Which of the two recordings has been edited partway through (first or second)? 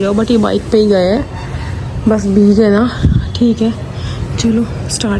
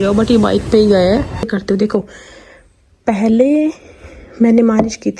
second